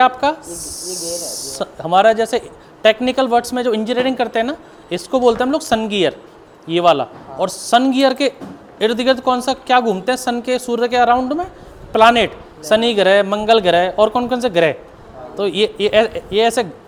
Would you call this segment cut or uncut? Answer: uncut